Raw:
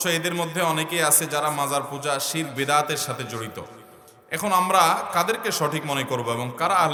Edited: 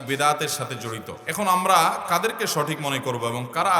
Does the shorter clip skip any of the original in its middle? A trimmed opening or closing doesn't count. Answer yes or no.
yes